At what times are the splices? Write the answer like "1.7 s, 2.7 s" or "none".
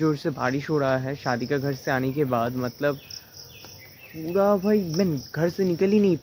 none